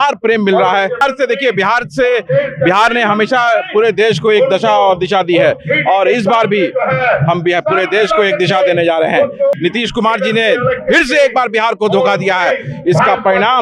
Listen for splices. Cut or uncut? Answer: cut